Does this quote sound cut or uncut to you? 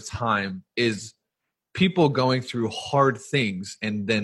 uncut